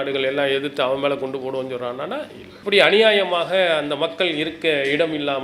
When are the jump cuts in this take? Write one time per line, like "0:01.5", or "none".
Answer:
0:02.4